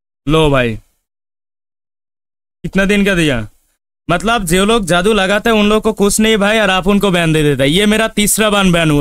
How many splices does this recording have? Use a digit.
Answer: 0